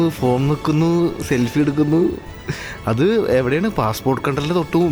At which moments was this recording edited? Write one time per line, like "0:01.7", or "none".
none